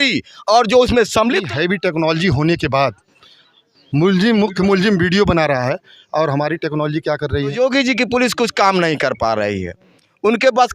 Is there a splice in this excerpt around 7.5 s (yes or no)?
yes